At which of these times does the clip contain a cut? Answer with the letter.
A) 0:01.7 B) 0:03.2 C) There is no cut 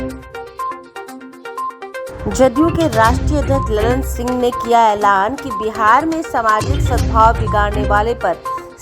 A